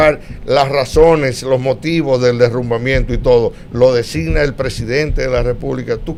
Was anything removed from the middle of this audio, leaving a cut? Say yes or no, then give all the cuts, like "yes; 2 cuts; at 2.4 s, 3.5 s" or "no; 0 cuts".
no; 0 cuts